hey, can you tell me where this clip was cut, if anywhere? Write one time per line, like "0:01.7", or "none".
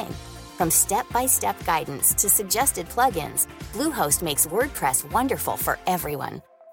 none